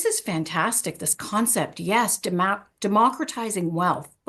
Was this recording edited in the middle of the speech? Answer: no; 0 cuts

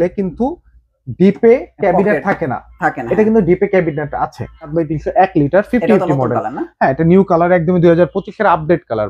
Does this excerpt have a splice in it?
yes; 1 cut; at 4.7 s

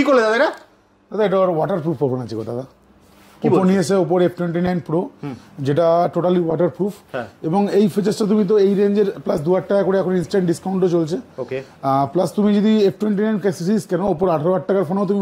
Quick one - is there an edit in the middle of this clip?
no; 0 cuts

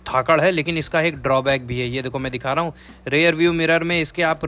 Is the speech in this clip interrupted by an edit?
no; 0 cuts

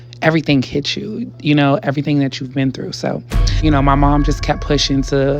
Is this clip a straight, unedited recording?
no; 1 cut; at 3.5 s

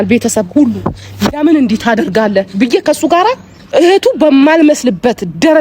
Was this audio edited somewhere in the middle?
yes; 1 cut; at 3.5 s

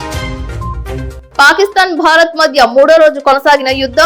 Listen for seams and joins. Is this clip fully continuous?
no; 1 cut; at 1.2 s

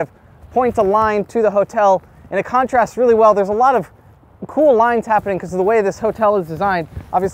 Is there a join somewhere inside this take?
no; 0 cuts

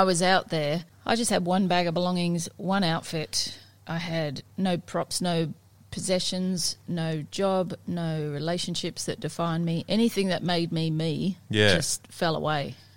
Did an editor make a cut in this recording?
yes; 1 cut; at 0.9 s

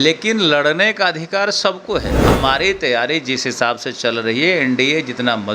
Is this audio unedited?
no; 1 cut; at 2.2 s

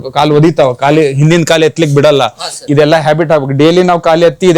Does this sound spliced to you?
yes; 1 cut; at 2.6 s

